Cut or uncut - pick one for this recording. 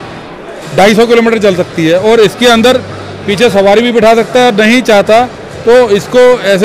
uncut